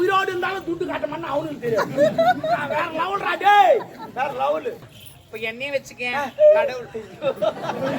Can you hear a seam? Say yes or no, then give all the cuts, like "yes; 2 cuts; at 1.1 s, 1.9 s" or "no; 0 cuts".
yes; 1 cut; at 4.9 s